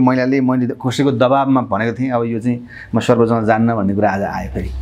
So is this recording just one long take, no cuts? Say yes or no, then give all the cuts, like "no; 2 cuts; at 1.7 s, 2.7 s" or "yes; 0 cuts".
yes; 0 cuts